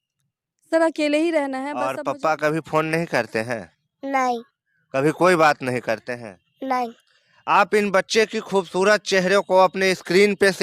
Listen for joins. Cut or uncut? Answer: cut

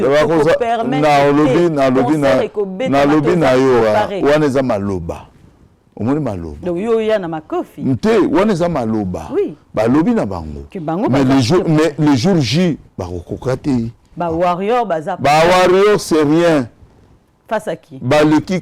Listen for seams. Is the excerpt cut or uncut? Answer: cut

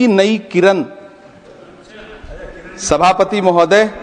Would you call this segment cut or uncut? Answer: uncut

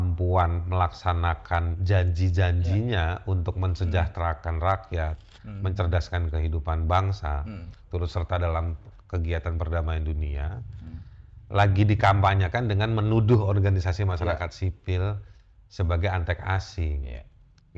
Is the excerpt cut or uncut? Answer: uncut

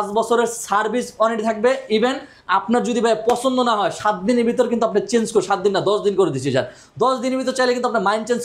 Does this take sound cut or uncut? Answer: uncut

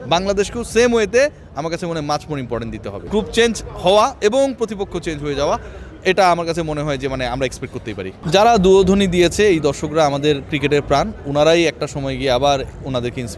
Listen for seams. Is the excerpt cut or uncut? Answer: cut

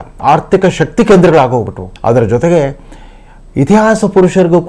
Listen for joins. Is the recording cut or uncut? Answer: uncut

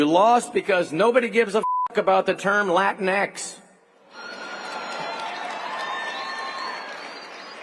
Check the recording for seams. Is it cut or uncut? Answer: uncut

